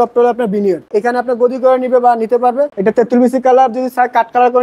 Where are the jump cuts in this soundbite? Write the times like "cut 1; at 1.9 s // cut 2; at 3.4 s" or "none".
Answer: cut 1; at 0.9 s // cut 2; at 2.7 s